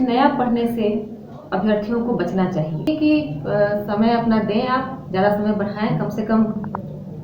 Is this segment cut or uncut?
cut